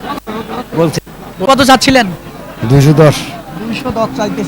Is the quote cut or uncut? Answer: cut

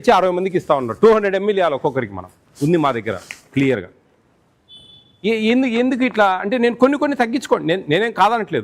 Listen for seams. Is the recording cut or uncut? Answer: uncut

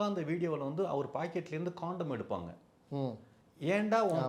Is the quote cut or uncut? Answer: uncut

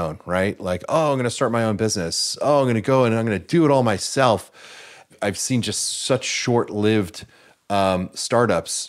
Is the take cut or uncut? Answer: uncut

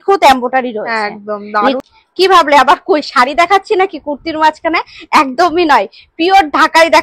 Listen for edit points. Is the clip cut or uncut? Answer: cut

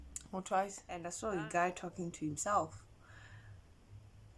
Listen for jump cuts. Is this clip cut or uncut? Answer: cut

